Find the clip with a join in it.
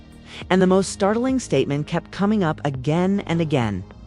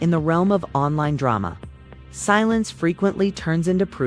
second; 1 cut; at 2.7 s

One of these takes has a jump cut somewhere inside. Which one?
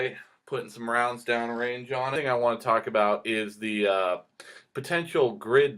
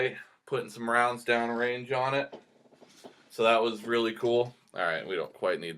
second; 1 cut; at 2.1 s

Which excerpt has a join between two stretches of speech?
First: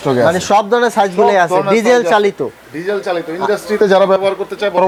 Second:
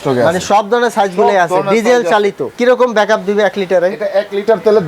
second; 1 cut; at 2.5 s

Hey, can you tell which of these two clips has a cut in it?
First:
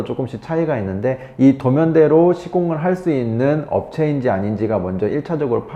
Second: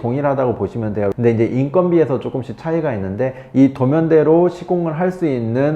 second; 1 cut; at 1.1 s

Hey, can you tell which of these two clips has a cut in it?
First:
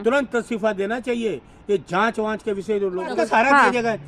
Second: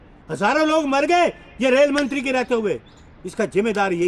first; 1 cut; at 3.1 s

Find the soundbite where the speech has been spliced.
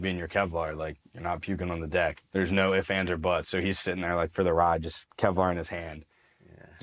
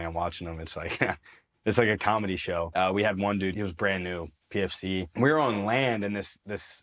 second; 3 cuts; at 2.7 s, 3.5 s, 5.1 s

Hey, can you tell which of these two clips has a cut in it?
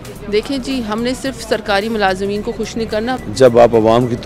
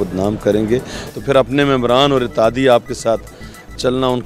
first; 1 cut; at 3.2 s

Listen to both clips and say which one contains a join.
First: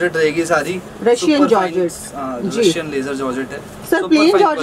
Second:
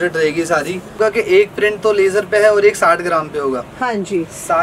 second; 1 cut; at 0.9 s

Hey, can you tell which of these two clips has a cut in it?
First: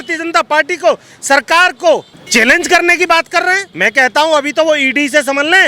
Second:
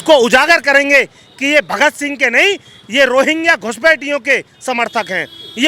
first; 2 cuts; at 2.2 s, 3.7 s

